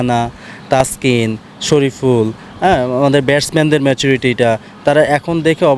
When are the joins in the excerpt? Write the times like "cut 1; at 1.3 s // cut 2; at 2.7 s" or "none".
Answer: none